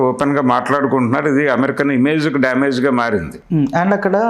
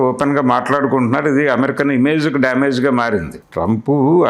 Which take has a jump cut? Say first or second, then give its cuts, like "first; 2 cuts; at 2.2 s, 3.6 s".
second; 1 cut; at 3.4 s